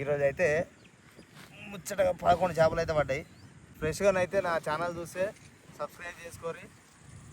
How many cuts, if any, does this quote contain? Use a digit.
1